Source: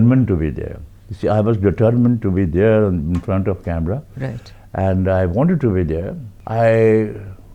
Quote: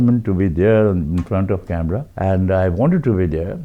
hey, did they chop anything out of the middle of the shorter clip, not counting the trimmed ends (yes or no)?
yes